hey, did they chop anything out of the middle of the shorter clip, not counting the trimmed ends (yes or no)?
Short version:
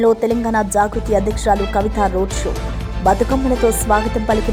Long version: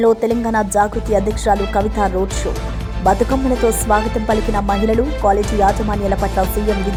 no